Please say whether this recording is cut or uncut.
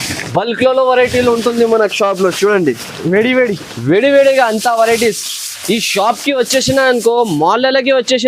uncut